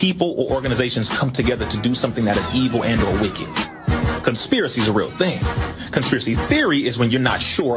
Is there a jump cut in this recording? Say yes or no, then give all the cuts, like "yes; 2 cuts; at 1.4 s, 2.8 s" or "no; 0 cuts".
no; 0 cuts